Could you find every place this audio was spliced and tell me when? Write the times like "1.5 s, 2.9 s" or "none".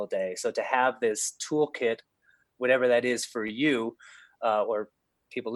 none